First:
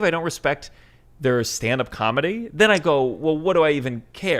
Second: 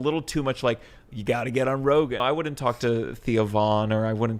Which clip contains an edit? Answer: second; 1 cut; at 2.2 s

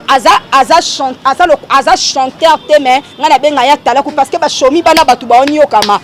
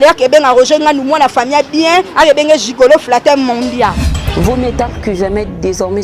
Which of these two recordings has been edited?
second; 1 cut; at 4.1 s

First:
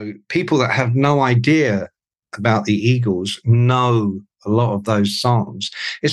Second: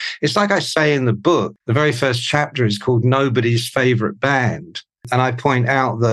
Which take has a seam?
second; 2 cuts; at 1.5 s, 5.0 s

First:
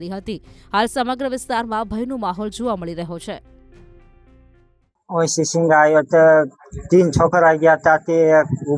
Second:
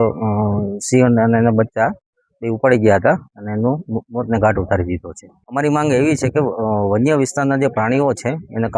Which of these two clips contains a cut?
first; 1 cut; at 4.7 s

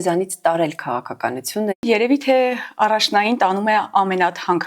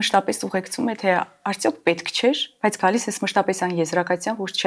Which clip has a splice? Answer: first; 1 cut; at 1.8 s

